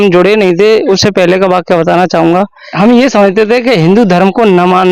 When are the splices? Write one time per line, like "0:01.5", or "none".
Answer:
0:02.6